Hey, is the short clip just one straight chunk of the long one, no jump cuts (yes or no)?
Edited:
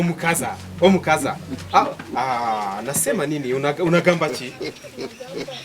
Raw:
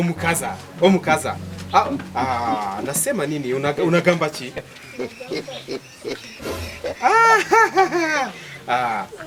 no